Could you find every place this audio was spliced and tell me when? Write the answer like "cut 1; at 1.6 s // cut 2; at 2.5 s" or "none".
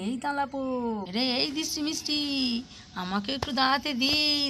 cut 1; at 1.1 s